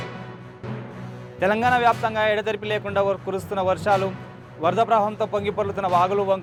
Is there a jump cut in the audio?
no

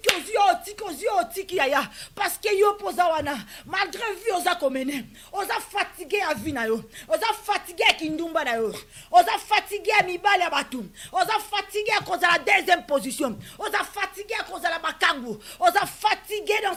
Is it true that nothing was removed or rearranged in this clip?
yes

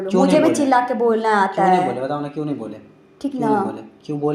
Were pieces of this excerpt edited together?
no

